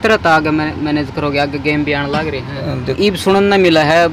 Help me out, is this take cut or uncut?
cut